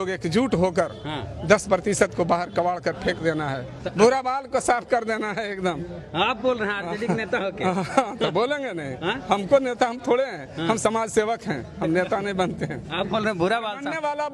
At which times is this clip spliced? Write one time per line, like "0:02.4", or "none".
none